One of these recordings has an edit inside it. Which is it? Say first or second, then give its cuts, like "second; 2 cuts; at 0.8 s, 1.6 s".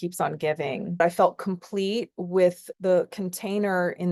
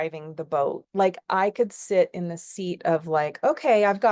first; 2 cuts; at 1.0 s, 2.7 s